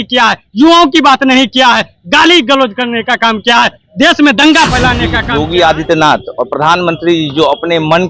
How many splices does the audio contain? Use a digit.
1